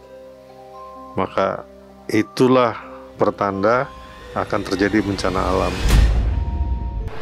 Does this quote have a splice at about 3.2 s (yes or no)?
no